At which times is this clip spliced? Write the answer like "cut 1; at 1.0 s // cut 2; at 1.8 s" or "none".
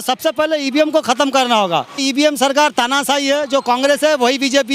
cut 1; at 2.0 s